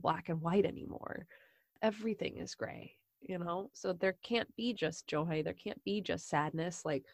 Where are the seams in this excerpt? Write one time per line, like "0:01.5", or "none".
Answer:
0:01.5